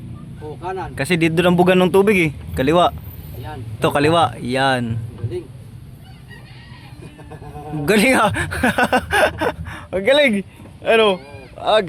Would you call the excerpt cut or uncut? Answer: uncut